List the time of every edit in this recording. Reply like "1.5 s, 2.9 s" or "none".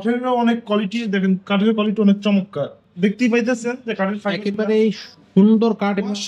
none

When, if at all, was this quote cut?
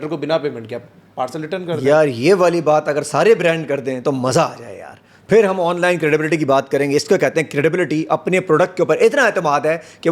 none

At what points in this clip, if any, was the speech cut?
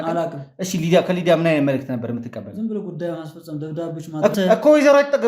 4.3 s

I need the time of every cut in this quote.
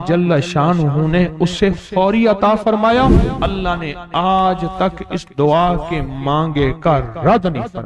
3.3 s

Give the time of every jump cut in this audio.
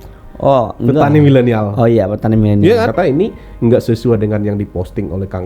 2.9 s

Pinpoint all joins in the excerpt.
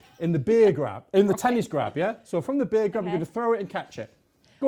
none

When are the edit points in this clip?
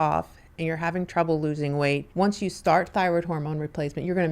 2.1 s

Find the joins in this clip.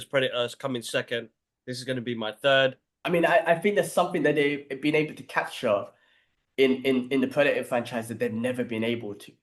3.0 s

